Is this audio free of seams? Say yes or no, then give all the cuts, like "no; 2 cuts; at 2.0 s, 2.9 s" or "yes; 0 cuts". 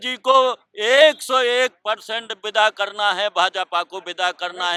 yes; 0 cuts